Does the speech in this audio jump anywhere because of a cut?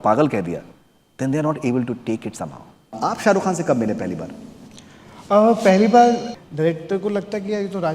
yes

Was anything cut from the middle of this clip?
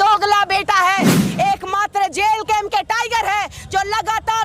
yes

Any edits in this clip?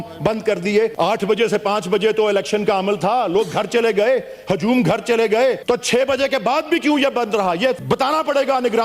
yes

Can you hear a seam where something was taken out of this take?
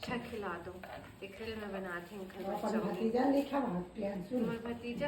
no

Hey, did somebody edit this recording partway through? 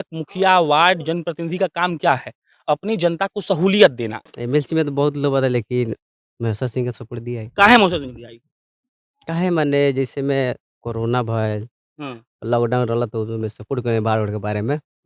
yes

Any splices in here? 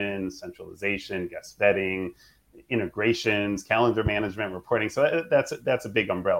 no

